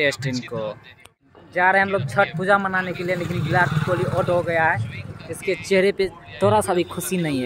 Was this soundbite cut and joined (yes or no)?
no